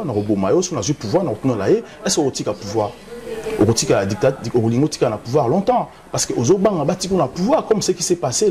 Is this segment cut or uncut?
uncut